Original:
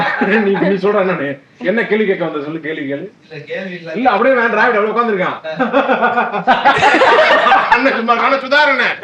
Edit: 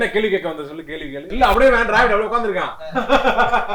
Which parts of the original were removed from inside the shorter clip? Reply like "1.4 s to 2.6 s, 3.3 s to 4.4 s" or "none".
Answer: 3.1 s to 4.0 s